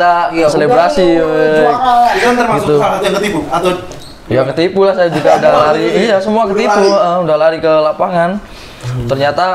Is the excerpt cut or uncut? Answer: uncut